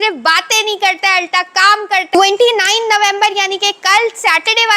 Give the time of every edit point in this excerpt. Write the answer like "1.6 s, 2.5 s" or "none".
2.1 s